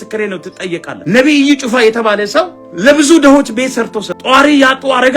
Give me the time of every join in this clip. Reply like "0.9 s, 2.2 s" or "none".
1.0 s, 4.2 s